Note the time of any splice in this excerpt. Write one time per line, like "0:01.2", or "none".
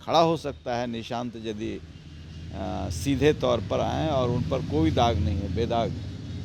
none